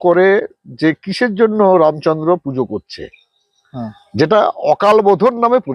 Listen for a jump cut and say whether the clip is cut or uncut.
uncut